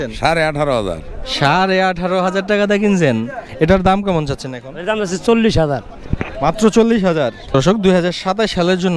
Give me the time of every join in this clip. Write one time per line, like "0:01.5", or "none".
0:03.4
0:07.5